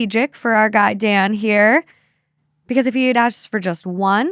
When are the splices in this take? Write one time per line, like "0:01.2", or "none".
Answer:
none